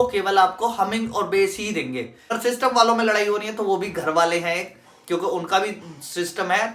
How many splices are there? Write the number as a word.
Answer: one